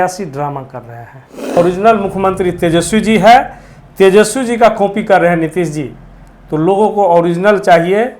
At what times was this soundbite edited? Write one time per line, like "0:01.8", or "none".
0:01.6